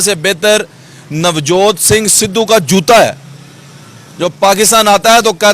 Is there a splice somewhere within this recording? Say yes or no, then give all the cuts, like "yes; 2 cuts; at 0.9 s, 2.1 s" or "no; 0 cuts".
no; 0 cuts